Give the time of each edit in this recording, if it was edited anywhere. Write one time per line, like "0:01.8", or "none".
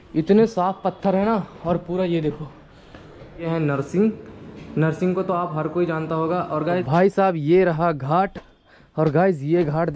0:03.5
0:06.7

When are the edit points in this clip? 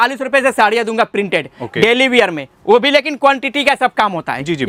none

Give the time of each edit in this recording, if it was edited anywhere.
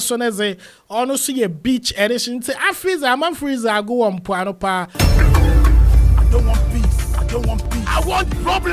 0:04.9

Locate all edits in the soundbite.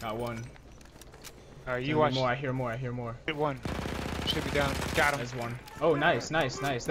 0:03.3

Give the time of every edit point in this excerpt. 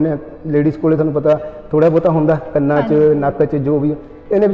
none

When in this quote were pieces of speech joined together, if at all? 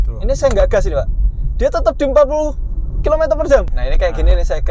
0:03.8

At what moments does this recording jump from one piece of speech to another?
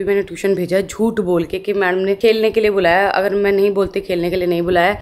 none

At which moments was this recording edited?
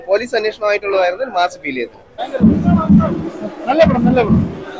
none

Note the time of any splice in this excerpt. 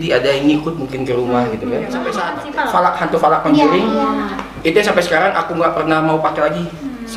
0:02.2

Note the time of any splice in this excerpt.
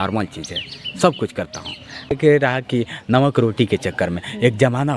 0:02.1

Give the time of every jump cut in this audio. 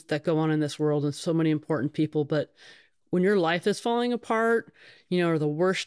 none

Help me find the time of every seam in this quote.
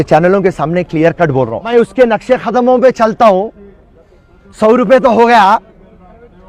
0:01.7

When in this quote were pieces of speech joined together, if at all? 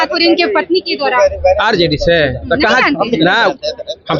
none

